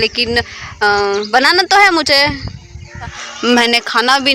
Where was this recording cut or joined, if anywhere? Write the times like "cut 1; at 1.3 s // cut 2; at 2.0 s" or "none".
cut 1; at 3.2 s